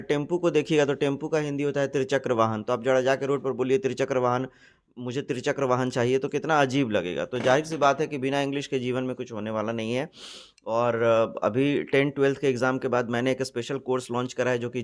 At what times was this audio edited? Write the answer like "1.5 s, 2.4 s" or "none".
none